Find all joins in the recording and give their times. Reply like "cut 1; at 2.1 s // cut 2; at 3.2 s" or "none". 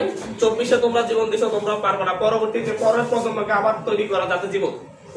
none